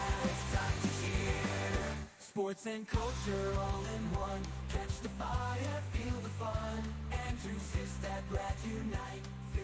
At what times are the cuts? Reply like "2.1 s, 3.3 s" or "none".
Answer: none